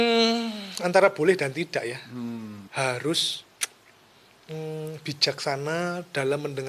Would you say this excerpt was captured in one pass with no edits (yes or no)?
no